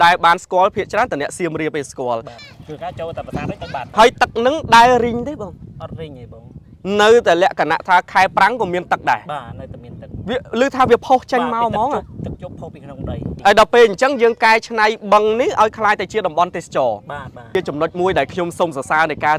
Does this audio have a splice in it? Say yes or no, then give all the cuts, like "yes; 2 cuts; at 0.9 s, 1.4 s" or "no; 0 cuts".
yes; 4 cuts; at 2.4 s, 3.8 s, 13.4 s, 17.5 s